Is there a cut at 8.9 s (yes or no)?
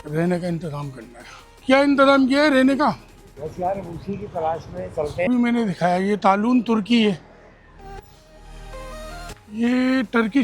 no